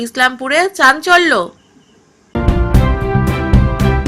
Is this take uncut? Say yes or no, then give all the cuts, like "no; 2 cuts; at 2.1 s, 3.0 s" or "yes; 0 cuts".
no; 1 cut; at 2.3 s